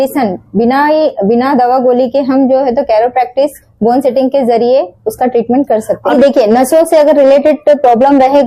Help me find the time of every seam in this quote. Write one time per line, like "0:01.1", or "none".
0:06.1

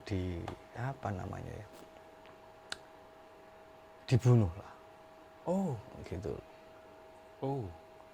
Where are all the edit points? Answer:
none

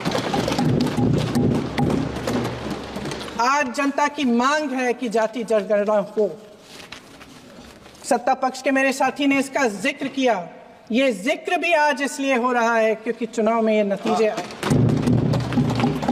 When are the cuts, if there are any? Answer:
none

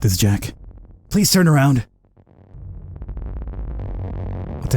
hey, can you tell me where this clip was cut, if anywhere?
0:02.6

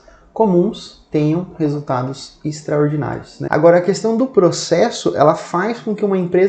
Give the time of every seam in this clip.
0:03.3

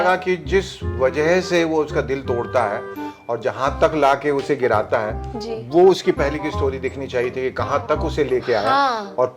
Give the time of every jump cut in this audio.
none

